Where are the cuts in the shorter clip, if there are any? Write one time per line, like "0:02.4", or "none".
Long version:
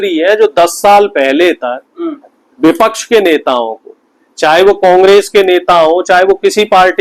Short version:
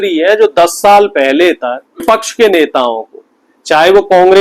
0:02.0